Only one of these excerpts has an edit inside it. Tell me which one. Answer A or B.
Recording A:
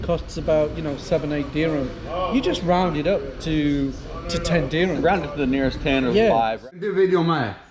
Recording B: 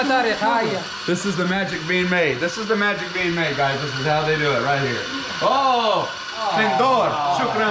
A